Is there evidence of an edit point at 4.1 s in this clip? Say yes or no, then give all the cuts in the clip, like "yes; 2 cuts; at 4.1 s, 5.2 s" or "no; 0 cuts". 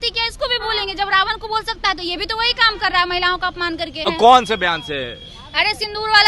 yes; 1 cut; at 4.1 s